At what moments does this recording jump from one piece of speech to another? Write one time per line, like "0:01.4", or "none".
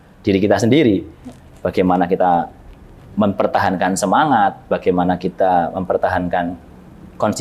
none

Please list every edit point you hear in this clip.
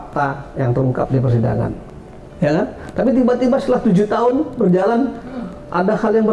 0:01.8

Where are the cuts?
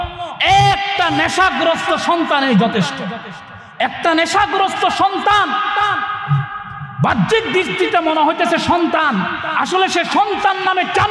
none

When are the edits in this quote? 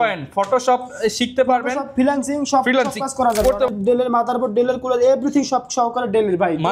0:03.7

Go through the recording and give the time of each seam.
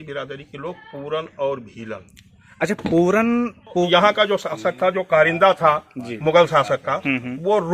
0:03.7

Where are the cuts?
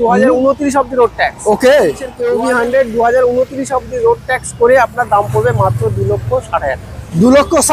0:02.4

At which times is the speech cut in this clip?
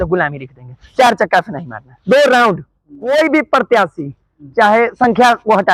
0:03.1

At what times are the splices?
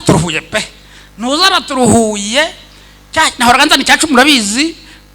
none

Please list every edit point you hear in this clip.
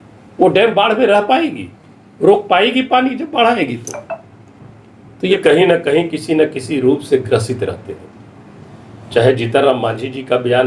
0:05.4

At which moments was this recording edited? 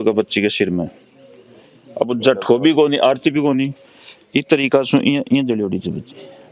none

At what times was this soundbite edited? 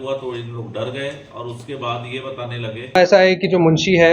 0:02.9

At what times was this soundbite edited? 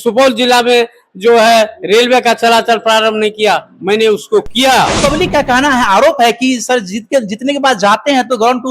0:05.0

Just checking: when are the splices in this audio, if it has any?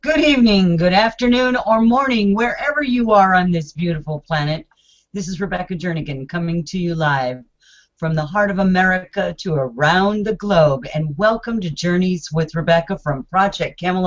none

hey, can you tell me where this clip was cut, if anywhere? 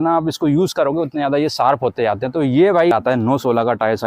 0:02.9

